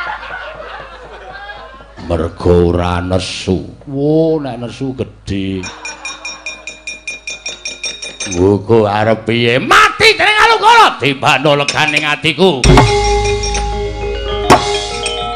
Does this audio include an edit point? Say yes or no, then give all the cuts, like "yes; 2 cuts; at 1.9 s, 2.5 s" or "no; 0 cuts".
yes; 1 cut; at 5.7 s